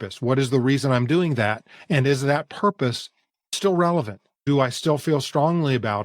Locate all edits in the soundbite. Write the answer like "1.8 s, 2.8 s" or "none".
3.5 s, 4.5 s